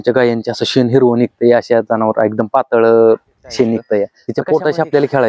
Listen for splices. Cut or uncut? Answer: cut